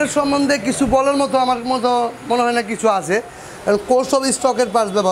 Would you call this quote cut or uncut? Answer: uncut